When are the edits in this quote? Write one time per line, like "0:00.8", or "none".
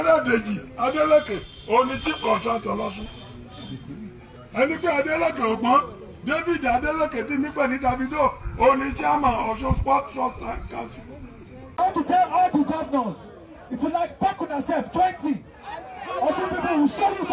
0:11.6